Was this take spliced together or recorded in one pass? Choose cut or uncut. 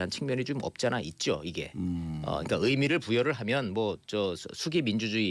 uncut